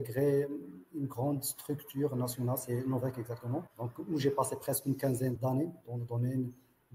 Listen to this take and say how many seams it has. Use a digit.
2